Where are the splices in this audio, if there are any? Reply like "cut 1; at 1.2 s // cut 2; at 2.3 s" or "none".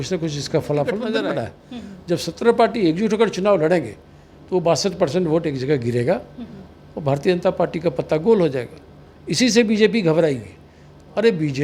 cut 1; at 1.2 s